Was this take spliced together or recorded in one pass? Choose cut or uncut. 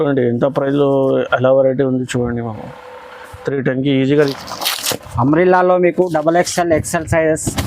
cut